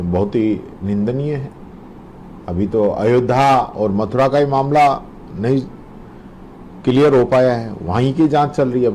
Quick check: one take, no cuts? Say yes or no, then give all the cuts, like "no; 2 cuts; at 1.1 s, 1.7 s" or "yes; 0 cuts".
yes; 0 cuts